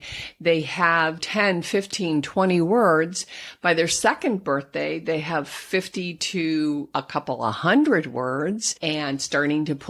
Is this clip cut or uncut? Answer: cut